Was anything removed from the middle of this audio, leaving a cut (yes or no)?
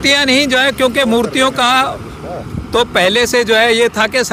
no